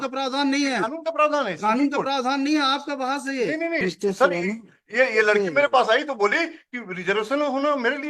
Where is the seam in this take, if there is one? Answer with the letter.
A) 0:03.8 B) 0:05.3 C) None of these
A